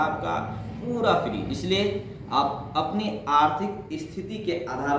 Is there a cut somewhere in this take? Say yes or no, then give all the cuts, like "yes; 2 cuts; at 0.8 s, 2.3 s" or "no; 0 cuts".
yes; 1 cut; at 1.5 s